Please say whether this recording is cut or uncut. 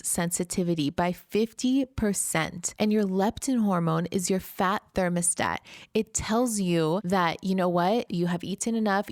cut